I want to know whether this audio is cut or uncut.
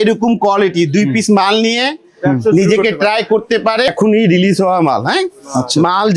cut